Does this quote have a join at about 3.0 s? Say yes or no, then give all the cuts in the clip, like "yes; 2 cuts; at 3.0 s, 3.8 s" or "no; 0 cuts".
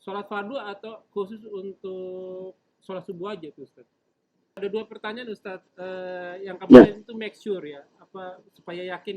no; 1 cut; at 4.6 s